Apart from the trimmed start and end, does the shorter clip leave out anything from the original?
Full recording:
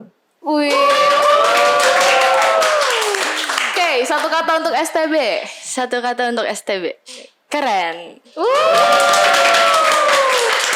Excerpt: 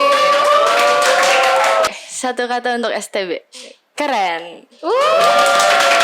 yes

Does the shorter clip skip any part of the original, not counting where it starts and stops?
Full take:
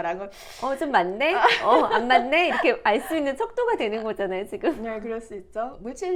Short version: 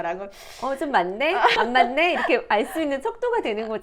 yes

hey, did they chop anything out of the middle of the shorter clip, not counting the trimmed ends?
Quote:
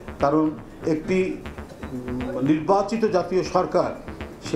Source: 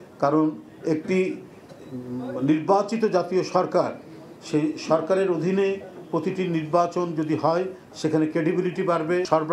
no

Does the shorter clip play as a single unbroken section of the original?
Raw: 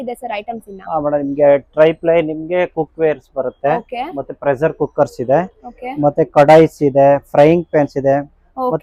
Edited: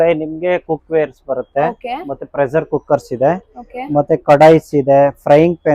yes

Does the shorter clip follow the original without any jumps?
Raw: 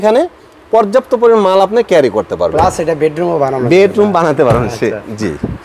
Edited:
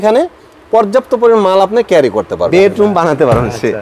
no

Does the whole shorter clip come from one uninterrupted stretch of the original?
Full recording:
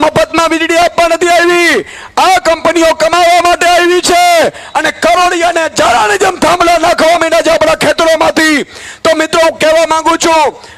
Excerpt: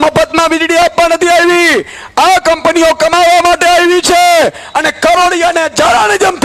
yes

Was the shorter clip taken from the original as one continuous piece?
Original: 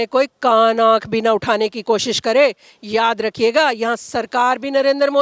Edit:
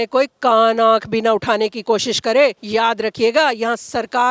no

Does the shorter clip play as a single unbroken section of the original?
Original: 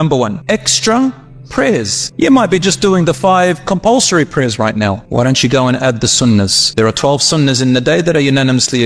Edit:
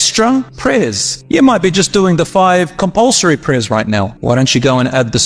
no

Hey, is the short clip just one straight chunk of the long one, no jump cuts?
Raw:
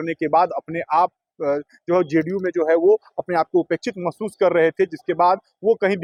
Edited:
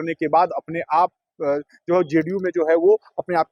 yes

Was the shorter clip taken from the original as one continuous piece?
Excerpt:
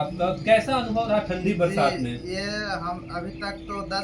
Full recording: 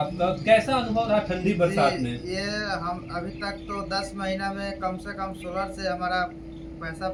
yes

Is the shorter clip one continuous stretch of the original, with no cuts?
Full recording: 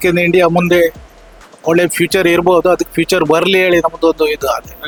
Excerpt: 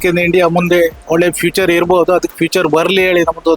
no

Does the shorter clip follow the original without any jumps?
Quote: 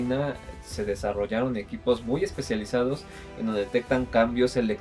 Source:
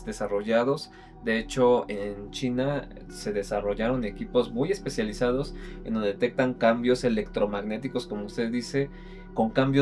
yes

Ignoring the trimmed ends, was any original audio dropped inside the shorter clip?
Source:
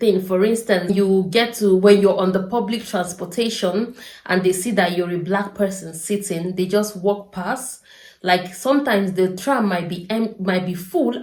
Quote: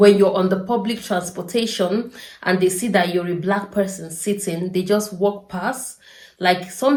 no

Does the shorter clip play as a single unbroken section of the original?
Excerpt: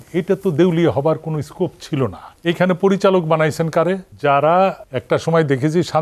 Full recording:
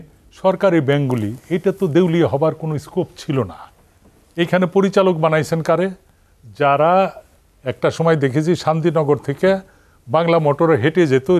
no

